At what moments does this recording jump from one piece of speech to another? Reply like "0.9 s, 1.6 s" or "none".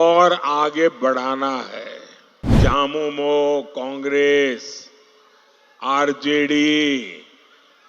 2.5 s